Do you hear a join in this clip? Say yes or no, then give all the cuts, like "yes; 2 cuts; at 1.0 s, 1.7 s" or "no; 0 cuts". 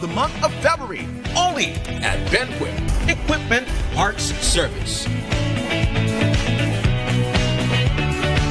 no; 0 cuts